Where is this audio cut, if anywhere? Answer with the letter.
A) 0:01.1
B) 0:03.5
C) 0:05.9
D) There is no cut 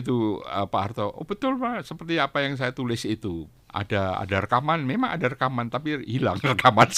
B